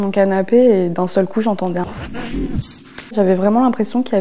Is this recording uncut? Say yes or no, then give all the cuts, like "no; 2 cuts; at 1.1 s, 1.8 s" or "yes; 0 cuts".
no; 1 cut; at 3.1 s